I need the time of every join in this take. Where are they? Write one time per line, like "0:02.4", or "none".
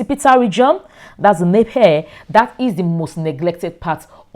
none